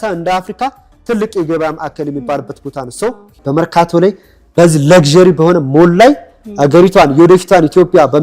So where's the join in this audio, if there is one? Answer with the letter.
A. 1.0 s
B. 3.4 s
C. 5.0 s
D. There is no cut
B